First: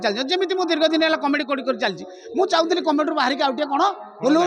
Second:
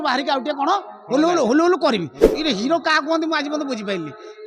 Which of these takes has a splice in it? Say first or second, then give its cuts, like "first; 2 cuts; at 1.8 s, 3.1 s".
second; 1 cut; at 2.3 s